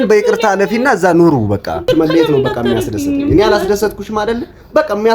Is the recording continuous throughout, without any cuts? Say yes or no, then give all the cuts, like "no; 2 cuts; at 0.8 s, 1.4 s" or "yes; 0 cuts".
no; 1 cut; at 1.8 s